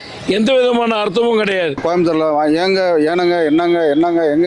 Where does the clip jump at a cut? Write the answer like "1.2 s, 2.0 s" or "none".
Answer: 1.8 s